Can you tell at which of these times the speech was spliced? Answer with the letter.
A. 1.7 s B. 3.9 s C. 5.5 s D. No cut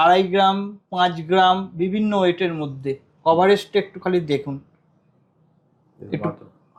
D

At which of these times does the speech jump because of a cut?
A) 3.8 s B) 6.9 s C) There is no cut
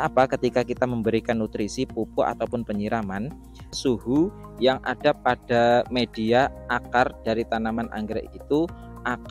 A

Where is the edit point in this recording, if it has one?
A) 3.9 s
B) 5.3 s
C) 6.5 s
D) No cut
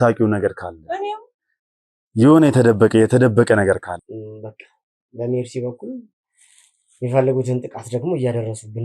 A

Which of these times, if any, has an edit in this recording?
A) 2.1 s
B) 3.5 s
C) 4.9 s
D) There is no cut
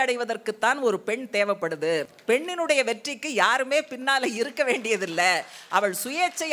A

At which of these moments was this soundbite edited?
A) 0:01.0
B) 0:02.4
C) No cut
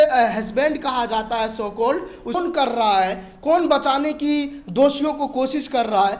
B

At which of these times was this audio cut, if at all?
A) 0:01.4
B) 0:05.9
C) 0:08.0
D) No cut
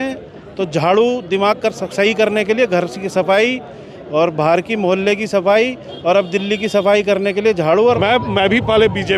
C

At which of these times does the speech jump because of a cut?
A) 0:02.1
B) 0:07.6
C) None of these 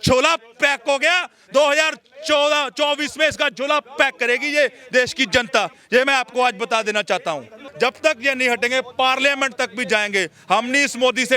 B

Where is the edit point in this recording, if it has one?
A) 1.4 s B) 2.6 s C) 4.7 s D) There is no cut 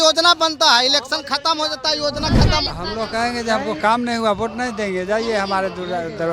B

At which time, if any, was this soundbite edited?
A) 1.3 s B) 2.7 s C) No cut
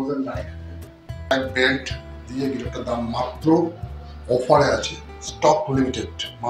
A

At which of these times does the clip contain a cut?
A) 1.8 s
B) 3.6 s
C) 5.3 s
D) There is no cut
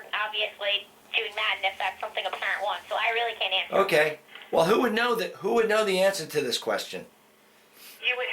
B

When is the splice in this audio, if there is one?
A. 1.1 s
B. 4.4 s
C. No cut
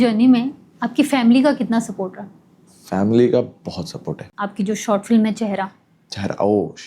B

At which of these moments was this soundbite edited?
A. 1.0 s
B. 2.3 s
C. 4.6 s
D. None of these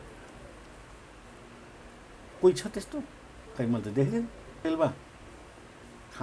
C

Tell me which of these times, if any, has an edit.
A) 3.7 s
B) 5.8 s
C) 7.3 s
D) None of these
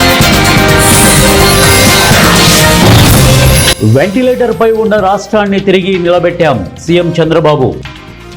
A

